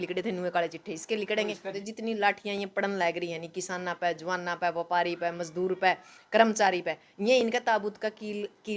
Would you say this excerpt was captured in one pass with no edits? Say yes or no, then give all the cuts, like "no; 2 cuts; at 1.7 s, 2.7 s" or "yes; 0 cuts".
no; 1 cut; at 1.8 s